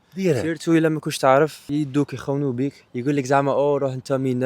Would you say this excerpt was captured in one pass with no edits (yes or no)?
no